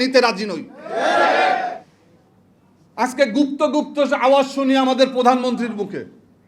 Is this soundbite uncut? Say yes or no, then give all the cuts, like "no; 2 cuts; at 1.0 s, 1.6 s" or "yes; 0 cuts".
no; 1 cut; at 1.8 s